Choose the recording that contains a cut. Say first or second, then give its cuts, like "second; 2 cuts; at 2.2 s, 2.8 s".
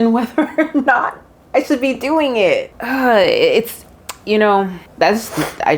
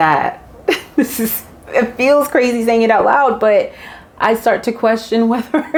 first; 2 cuts; at 2.8 s, 4.8 s